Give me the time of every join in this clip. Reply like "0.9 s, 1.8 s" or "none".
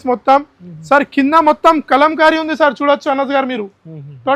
none

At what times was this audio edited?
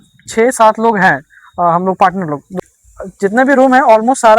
2.5 s

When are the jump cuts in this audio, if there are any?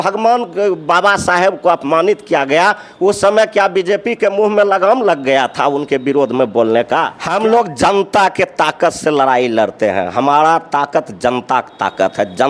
7.2 s

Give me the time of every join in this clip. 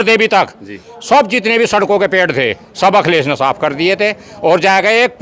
none

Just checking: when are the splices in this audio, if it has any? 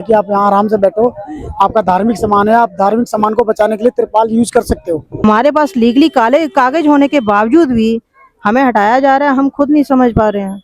5.2 s

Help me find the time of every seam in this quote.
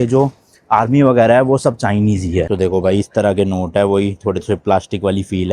2.5 s

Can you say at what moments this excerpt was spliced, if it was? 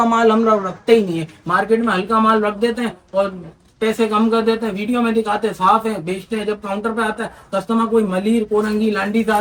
none

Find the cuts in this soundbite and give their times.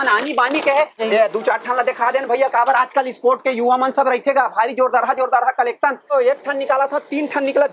1.0 s, 6.1 s

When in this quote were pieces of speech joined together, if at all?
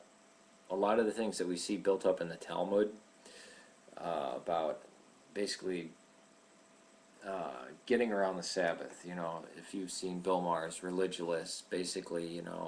9.9 s

